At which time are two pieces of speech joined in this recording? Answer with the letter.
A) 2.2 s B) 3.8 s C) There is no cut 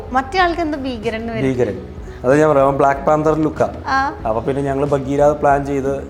C